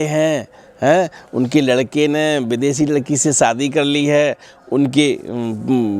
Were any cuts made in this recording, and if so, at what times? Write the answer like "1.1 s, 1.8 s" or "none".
none

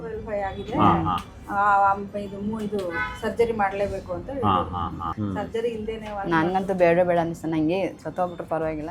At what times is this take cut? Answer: 5.1 s

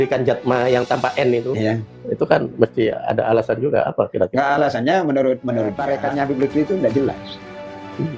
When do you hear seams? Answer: 5.8 s

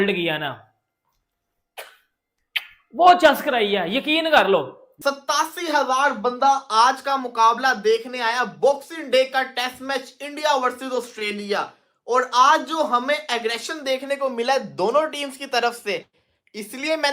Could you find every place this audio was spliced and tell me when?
5.0 s

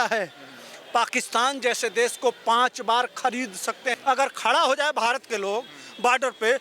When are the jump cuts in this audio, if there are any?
3.9 s

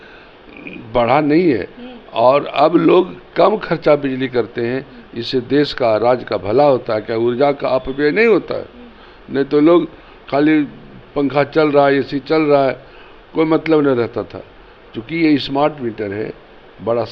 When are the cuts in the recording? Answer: none

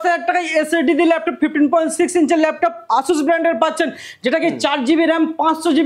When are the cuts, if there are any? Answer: none

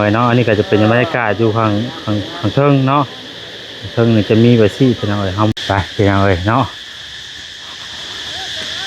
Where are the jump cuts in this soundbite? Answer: 5.5 s

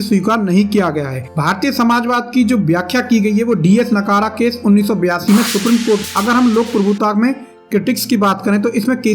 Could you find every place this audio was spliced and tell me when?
6.0 s

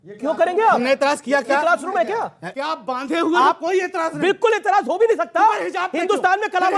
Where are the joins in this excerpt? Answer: 2.5 s

